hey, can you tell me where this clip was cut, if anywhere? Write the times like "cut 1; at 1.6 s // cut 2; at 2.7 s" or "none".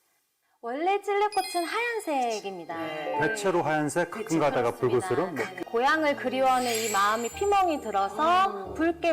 cut 1; at 5.6 s